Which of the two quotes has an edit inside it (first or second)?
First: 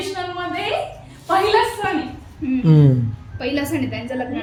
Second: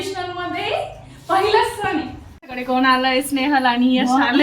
second